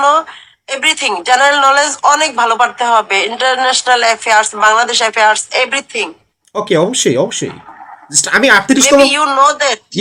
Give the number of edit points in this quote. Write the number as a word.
zero